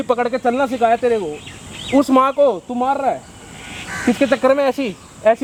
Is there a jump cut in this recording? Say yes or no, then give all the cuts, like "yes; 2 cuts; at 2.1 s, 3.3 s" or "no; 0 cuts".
no; 0 cuts